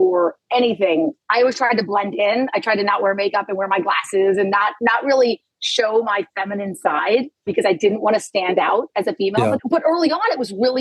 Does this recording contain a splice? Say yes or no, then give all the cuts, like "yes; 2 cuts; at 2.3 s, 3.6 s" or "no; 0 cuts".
yes; 1 cut; at 1.2 s